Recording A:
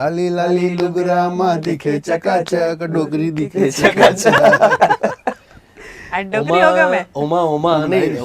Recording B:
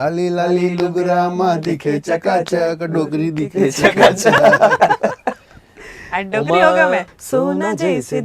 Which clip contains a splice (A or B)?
B